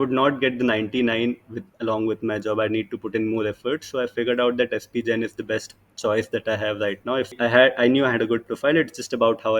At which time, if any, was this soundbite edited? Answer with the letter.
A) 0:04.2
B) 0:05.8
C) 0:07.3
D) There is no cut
C